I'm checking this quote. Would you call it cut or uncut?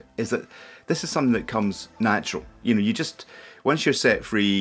uncut